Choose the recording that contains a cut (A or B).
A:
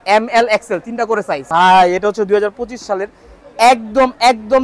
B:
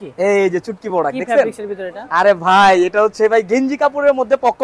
A